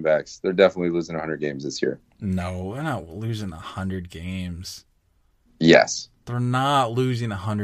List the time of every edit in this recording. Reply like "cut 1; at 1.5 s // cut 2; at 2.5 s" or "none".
cut 1; at 2.1 s